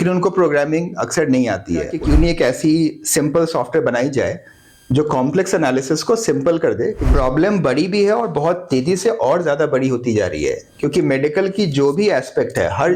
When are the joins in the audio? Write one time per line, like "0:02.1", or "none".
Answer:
0:01.9
0:07.0